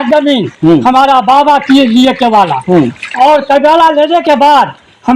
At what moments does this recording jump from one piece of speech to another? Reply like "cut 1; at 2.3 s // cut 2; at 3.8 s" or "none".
none